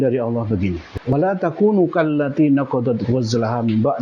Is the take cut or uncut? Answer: cut